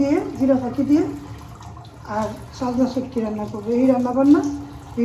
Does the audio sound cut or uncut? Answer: uncut